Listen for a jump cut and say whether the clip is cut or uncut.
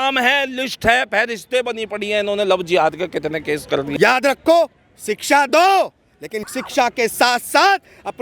cut